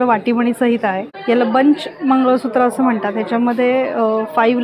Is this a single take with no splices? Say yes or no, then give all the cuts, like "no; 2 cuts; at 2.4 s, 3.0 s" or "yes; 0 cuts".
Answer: no; 1 cut; at 1.1 s